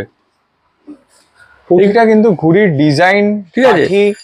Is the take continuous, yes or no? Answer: yes